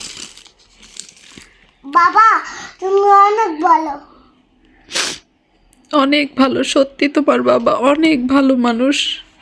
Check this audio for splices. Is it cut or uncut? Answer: uncut